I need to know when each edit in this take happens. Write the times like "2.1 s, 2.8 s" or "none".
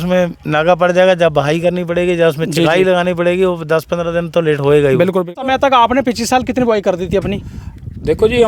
5.4 s